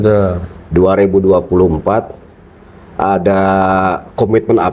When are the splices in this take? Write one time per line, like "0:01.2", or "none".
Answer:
none